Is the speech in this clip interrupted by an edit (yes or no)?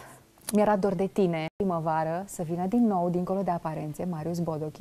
no